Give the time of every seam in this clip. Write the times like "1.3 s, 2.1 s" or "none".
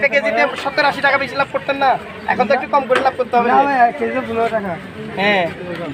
none